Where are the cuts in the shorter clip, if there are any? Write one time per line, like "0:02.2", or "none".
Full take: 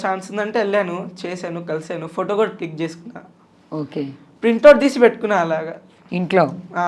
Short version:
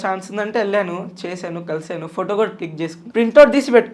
0:03.0